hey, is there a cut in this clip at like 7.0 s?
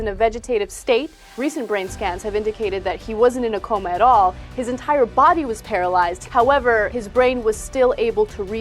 yes; 3 cuts; at 1.4 s, 6.2 s, 7.0 s

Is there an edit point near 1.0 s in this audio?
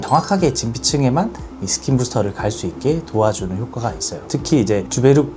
no; 1 cut; at 4.2 s

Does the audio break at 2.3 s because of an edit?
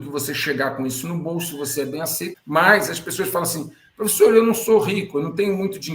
yes; 1 cut; at 2.3 s

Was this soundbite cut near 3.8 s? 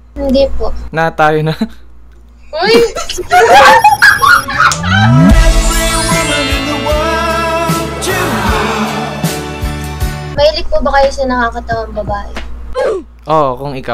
no; 1 cut; at 10.2 s

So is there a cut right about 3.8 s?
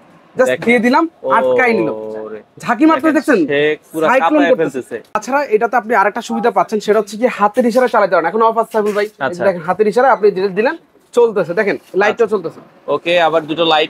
no; 1 cut; at 5.2 s

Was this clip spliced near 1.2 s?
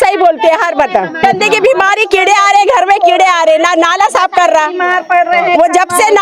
yes; 1 cut; at 1.2 s

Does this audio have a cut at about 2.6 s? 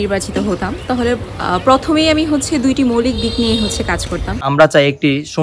no; 1 cut; at 4.4 s

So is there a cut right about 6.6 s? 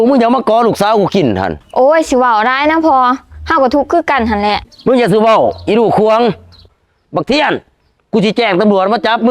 yes; 1 cut; at 6.6 s

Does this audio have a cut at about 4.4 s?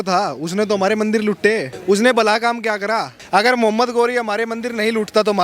no; 2 cuts; at 1.7 s, 3.2 s

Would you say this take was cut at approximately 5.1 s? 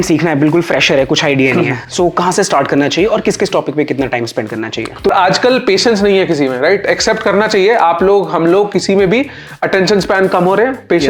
yes; 1 cut; at 5.1 s

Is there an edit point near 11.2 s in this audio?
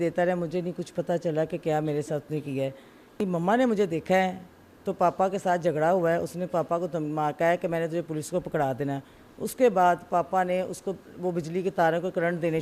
no; 1 cut; at 3.2 s

